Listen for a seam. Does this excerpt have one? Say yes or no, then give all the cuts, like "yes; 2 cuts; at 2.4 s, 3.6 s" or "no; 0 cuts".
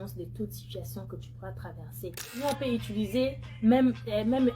yes; 1 cut; at 2.4 s